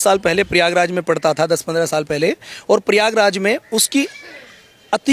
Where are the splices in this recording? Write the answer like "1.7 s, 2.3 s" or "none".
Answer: none